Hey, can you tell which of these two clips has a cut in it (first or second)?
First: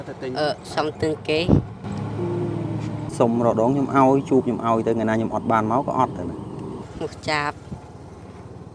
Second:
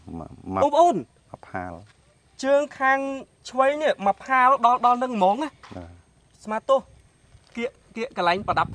first